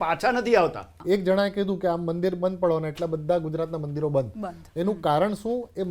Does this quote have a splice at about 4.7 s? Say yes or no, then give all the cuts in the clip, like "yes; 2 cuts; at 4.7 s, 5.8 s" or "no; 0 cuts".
no; 1 cut; at 1.0 s